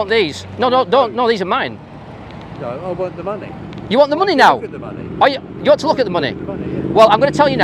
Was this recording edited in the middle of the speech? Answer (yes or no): no